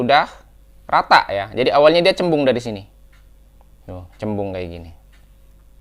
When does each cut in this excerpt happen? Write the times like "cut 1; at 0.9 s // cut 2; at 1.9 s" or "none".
none